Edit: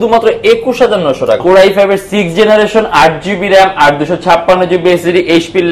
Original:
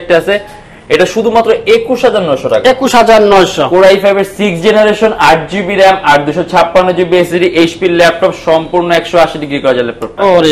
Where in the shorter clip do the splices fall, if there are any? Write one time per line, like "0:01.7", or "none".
0:01.4